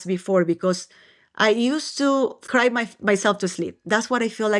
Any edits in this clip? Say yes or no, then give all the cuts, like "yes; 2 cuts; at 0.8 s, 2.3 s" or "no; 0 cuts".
yes; 1 cut; at 2.4 s